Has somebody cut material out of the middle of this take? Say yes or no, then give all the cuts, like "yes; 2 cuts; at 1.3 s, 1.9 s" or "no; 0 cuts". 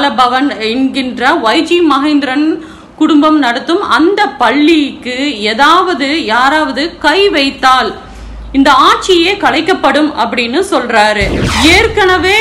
yes; 1 cut; at 11.4 s